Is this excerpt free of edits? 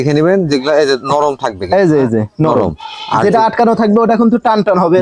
yes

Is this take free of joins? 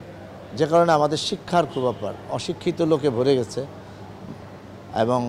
yes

